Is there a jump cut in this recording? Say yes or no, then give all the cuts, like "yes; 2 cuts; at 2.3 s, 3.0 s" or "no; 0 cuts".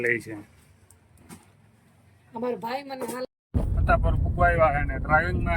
yes; 1 cut; at 3.2 s